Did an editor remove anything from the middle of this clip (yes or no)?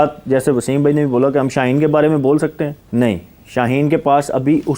yes